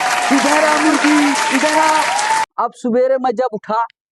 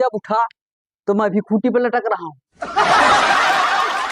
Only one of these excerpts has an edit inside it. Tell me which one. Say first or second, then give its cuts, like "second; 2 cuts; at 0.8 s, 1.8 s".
first; 1 cut; at 2.5 s